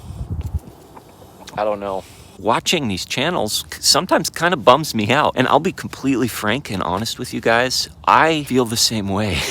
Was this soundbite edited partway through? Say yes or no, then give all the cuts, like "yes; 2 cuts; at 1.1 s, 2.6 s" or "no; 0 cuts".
yes; 3 cuts; at 2.3 s, 5.3 s, 8.4 s